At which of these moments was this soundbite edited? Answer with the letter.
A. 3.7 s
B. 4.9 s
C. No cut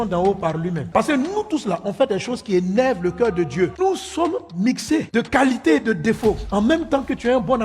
A